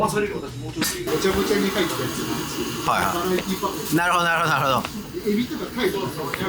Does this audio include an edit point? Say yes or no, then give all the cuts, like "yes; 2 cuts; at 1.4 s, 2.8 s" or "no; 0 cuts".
yes; 1 cut; at 1.0 s